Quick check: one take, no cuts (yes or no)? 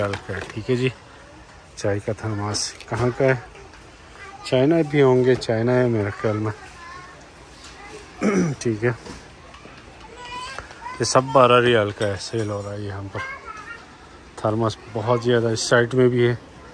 yes